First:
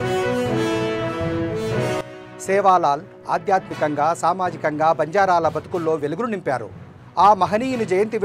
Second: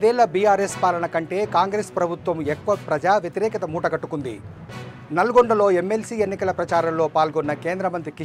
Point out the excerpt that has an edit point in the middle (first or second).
first